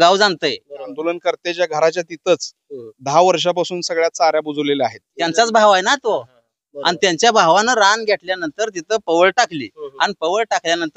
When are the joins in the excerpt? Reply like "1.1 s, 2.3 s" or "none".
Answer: 1.0 s, 5.1 s